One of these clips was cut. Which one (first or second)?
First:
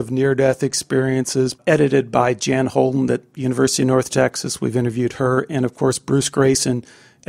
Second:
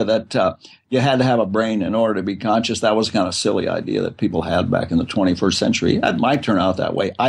first